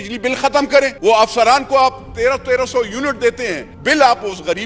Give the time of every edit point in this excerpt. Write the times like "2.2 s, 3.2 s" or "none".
1.0 s, 3.7 s